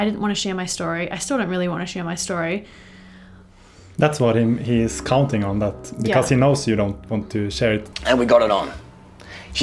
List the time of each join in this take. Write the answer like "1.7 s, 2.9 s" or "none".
7.9 s